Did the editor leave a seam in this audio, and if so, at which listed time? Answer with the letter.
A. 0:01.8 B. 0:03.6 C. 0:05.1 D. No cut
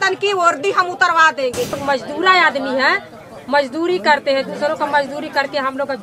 A